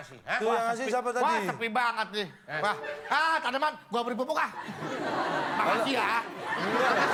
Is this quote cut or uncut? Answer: uncut